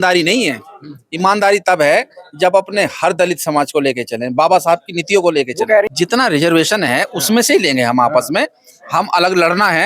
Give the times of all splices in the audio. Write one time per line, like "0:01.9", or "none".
0:05.9